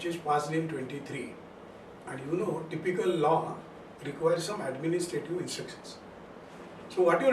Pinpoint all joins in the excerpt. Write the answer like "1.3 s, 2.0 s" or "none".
6.4 s